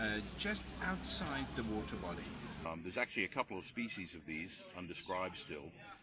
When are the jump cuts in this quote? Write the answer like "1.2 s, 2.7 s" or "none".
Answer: 2.6 s